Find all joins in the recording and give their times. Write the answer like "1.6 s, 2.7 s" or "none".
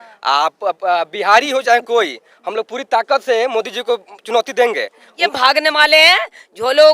5.0 s